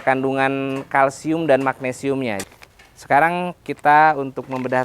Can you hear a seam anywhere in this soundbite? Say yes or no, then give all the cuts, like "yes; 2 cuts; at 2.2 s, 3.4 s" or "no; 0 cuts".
yes; 1 cut; at 2.4 s